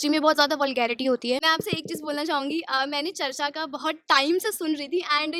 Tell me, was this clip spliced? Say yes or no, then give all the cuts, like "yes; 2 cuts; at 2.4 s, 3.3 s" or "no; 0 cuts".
yes; 1 cut; at 1.5 s